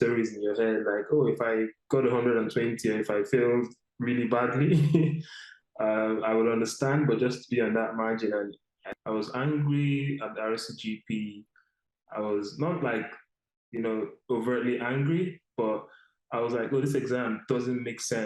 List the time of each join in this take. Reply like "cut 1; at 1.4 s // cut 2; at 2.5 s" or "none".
cut 1; at 8.9 s